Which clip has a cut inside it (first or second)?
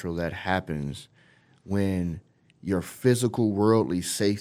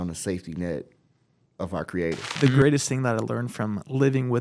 second